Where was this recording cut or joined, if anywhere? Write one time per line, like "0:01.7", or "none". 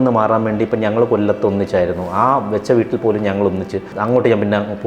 0:03.9